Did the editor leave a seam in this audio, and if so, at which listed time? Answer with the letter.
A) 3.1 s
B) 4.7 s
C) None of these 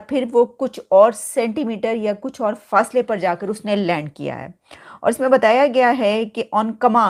C